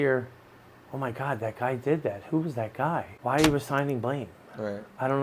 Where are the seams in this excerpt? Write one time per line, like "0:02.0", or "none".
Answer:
0:03.1